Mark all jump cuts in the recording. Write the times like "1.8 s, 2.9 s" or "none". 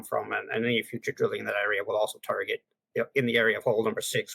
2.8 s